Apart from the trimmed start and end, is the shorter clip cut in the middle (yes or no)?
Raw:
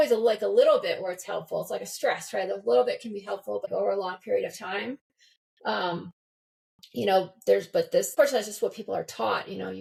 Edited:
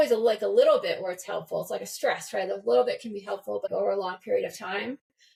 no